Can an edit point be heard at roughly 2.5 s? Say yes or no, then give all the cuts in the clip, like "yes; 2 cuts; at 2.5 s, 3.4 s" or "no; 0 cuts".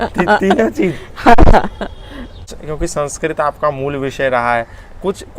yes; 1 cut; at 2.5 s